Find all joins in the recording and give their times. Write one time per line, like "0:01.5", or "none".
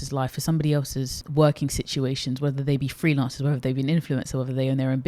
0:01.2

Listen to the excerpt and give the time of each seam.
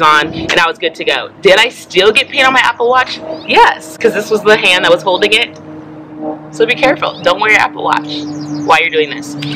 none

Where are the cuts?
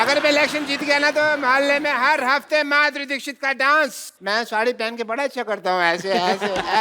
0:04.1

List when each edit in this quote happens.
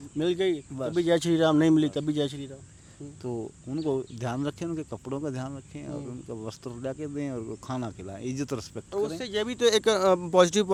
none

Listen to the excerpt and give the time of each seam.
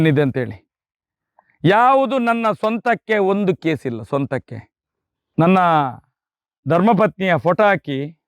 0:05.4

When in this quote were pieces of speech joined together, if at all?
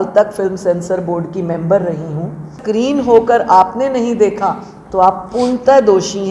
0:02.6

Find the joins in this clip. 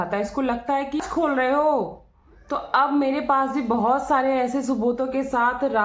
0:01.0

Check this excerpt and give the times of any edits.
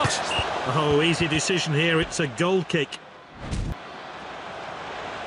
0:03.8

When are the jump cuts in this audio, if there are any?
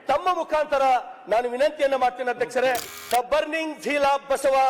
0:02.9

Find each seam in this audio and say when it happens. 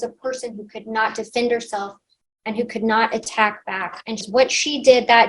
0:04.2

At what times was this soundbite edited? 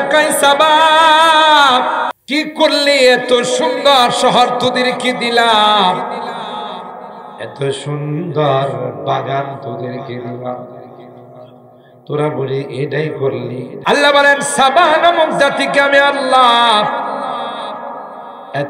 0:02.1
0:13.7

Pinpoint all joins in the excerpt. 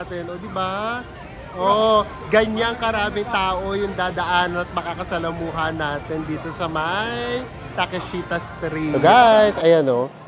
0:08.9

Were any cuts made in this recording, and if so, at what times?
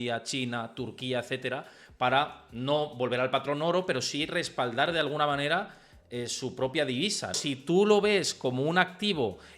0:07.4

